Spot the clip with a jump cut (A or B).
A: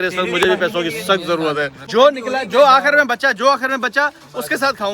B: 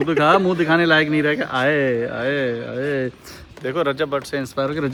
A